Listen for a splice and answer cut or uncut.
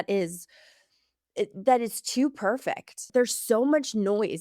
cut